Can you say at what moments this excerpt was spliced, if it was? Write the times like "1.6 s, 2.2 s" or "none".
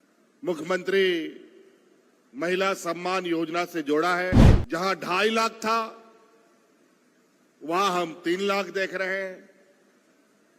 4.5 s